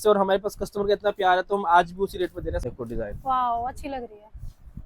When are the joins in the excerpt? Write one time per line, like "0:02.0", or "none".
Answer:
0:02.6